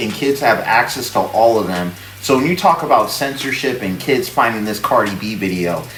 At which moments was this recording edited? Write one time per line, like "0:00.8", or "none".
none